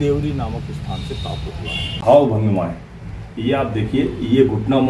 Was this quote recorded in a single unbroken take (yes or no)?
no